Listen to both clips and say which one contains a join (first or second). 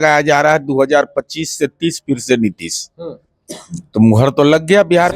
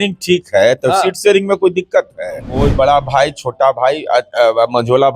second